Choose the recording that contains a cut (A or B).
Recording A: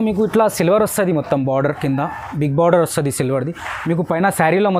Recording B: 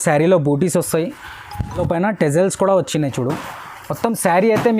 B